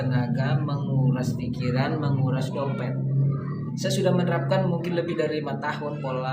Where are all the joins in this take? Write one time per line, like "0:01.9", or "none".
0:03.7